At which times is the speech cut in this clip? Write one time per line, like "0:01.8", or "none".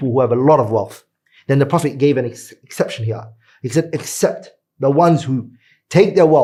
none